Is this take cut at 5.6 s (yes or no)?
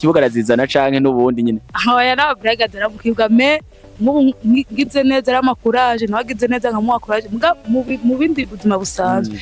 no